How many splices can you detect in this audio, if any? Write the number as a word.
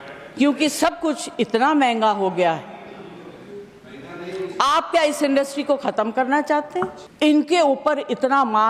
one